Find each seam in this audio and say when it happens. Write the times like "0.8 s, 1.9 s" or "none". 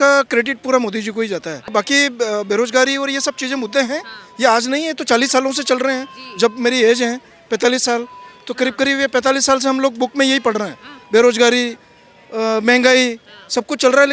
1.7 s

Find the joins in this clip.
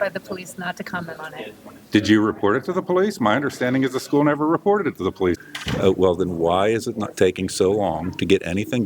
5.4 s

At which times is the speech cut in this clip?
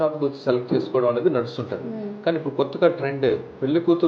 none

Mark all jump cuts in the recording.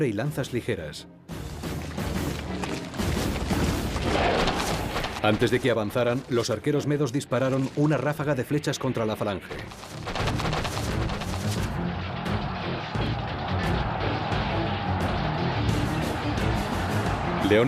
4.4 s

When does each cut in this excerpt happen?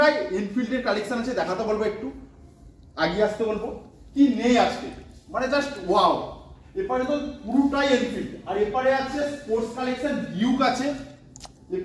none

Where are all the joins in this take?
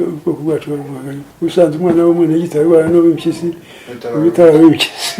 none

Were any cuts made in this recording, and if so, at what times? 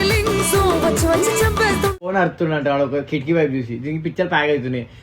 2.1 s

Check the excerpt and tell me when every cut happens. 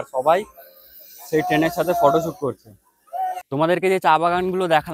3.7 s

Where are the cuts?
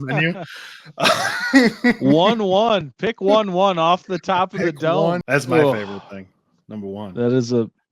5.2 s

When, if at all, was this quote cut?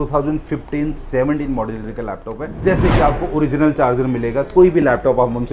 2.4 s

